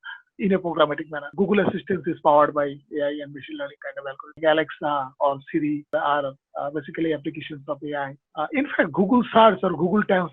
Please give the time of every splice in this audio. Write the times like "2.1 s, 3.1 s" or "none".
1.2 s, 4.4 s, 5.9 s, 8.2 s